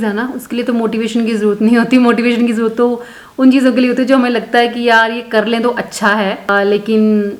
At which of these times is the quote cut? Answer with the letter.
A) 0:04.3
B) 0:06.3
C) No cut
C